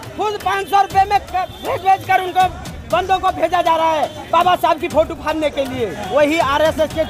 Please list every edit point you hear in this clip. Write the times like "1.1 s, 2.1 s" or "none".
6.0 s